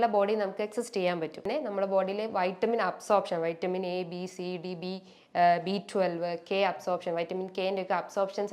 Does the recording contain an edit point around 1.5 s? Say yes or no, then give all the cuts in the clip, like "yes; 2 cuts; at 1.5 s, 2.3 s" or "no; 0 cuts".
yes; 1 cut; at 1.5 s